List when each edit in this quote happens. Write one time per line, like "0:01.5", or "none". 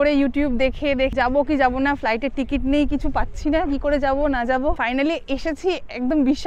0:01.1
0:04.8